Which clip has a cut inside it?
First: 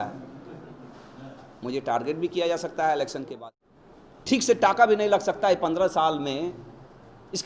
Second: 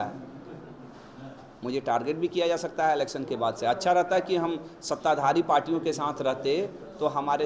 first; 1 cut; at 3.4 s

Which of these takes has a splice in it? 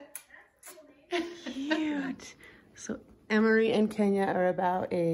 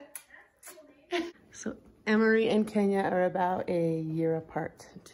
second; 1 cut; at 1.4 s

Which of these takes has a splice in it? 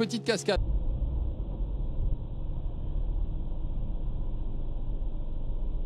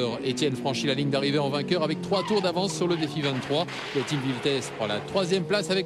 second; 1 cut; at 4.0 s

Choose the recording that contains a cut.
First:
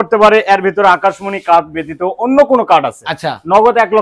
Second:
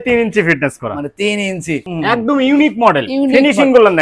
second; 1 cut; at 1.9 s

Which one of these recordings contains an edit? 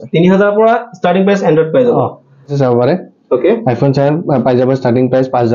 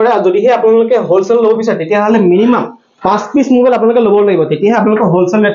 first; 1 cut; at 2.5 s

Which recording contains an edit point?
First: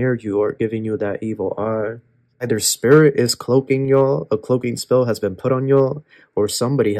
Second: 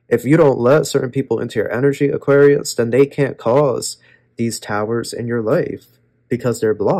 first; 1 cut; at 2.4 s

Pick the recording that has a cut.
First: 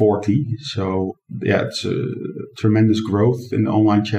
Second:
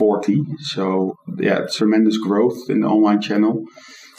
second; 1 cut; at 1.4 s

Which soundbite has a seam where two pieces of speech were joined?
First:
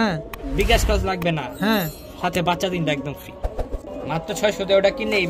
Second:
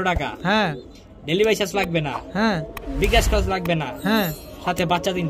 first; 1 cut; at 3.8 s

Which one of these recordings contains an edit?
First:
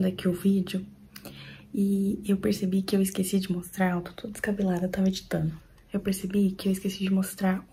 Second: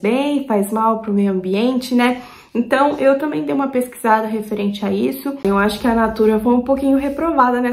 second; 1 cut; at 5.4 s

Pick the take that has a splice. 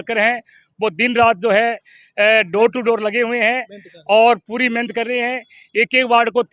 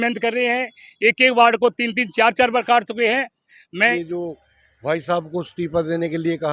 second; 1 cut; at 3.9 s

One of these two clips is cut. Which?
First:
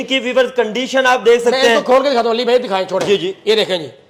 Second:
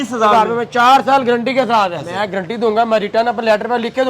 second; 1 cut; at 2.1 s

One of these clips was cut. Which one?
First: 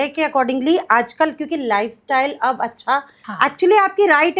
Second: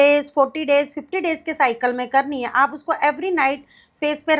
first; 1 cut; at 3.2 s

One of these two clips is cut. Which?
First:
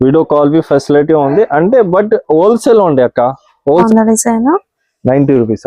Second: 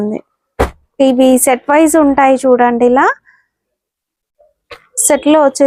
first; 1 cut; at 3.9 s

